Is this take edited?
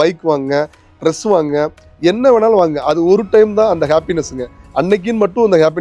no; 0 cuts

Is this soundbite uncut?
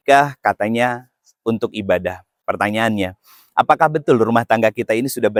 yes; 0 cuts

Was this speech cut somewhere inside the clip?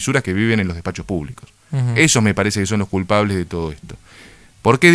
no; 0 cuts

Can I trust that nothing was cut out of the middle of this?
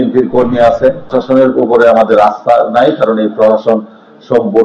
no; 1 cut; at 1.1 s

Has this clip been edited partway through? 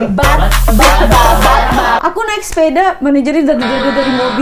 yes; 1 cut; at 2.0 s

